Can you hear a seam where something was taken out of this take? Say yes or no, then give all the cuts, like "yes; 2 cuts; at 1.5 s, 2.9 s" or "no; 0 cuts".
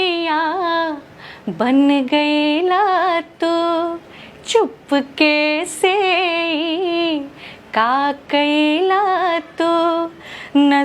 no; 0 cuts